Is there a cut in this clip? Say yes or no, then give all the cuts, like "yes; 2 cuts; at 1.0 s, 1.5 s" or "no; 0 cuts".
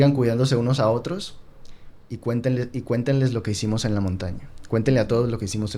no; 0 cuts